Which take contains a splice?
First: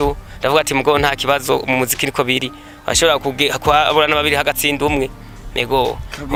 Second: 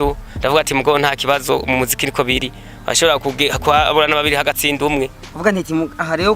second; 1 cut; at 5.2 s

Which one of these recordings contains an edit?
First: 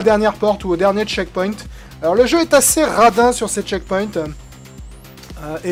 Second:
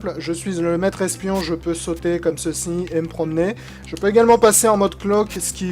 second; 1 cut; at 1.5 s

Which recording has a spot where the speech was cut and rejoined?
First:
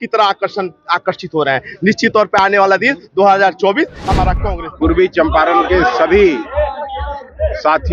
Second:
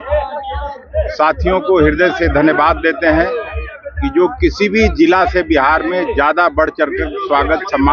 first; 1 cut; at 4.4 s

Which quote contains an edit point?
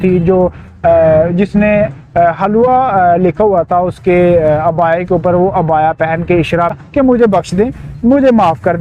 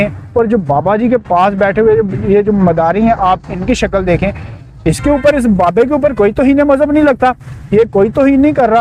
first; 1 cut; at 6.7 s

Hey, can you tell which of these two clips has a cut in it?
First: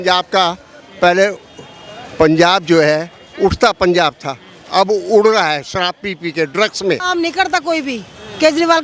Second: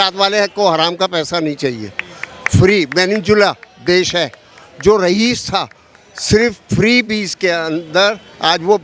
first; 1 cut; at 7.0 s

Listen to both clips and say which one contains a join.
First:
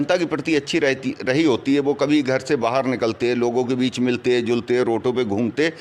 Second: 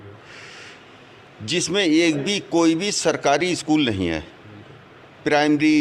first; 1 cut; at 3.7 s

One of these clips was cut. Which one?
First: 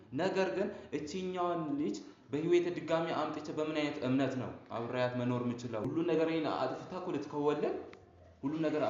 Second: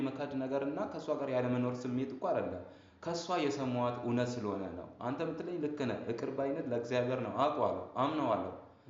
first; 1 cut; at 5.9 s

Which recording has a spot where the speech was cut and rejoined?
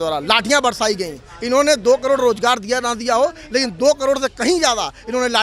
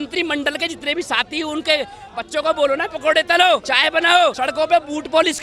second; 1 cut; at 4.2 s

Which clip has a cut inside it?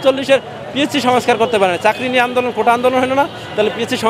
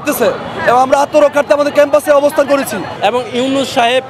second; 1 cut; at 2.9 s

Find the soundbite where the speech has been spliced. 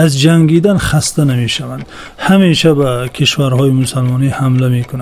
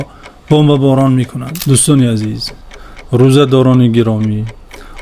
second; 1 cut; at 1.5 s

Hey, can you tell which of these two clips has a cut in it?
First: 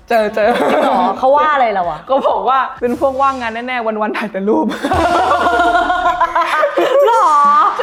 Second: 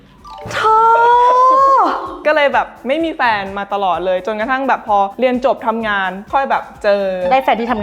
second; 1 cut; at 2.1 s

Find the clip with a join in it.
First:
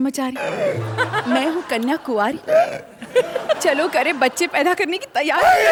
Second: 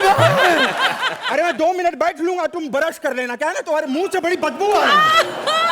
second; 1 cut; at 1.1 s

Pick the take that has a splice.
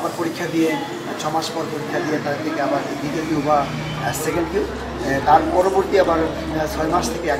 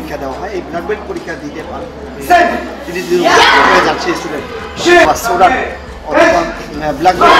second; 1 cut; at 5.1 s

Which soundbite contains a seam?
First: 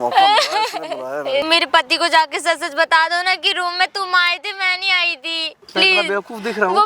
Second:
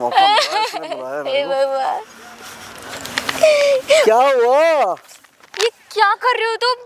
first; 2 cuts; at 1.4 s, 5.5 s

